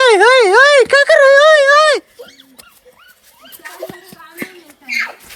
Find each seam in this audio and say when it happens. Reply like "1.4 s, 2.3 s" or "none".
none